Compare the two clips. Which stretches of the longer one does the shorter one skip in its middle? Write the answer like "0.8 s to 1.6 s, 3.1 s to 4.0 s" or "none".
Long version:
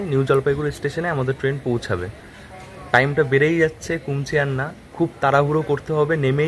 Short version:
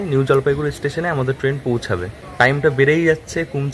2.2 s to 2.7 s